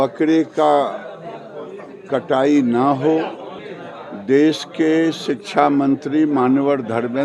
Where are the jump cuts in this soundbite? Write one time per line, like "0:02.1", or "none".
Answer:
0:03.6